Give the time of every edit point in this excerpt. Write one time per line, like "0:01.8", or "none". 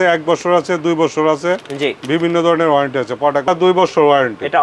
0:03.4